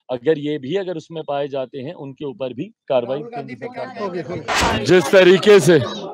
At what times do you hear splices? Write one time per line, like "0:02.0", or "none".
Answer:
0:04.5